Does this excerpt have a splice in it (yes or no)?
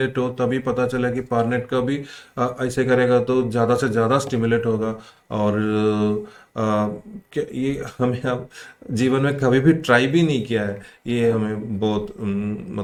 no